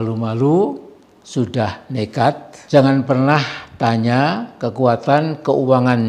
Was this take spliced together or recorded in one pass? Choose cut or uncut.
cut